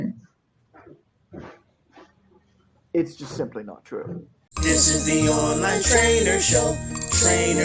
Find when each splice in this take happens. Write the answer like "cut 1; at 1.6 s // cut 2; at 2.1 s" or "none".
cut 1; at 4.5 s